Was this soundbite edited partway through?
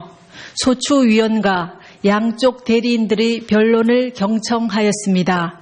no; 0 cuts

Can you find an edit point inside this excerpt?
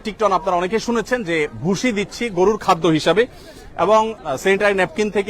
no; 0 cuts

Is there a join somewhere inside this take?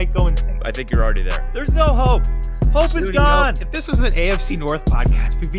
no; 0 cuts

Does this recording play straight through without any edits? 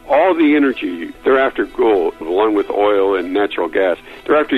no; 2 cuts; at 1.1 s, 2.2 s

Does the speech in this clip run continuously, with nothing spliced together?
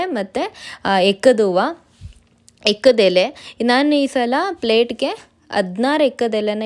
yes; 0 cuts

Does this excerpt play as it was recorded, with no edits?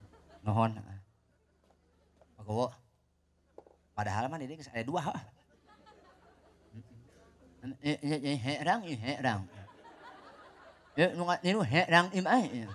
yes; 0 cuts

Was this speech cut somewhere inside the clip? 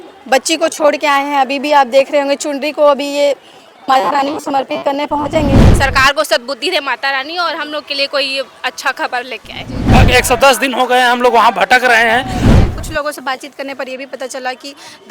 yes; 3 cuts; at 5.6 s, 9.9 s, 12.4 s

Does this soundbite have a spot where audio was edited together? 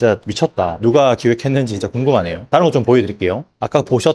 no; 0 cuts

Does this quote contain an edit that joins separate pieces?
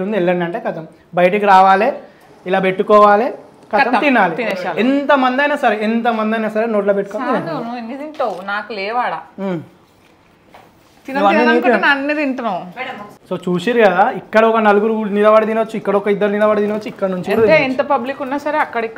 no; 0 cuts

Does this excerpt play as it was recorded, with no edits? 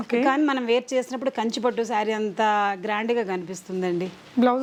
yes; 0 cuts

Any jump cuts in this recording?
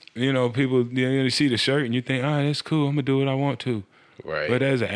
no; 0 cuts

